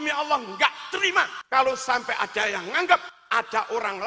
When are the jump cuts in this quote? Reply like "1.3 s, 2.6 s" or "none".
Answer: 1.4 s, 3.2 s